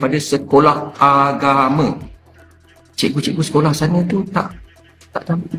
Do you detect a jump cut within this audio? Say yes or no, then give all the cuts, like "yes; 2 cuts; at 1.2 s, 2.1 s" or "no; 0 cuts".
no; 0 cuts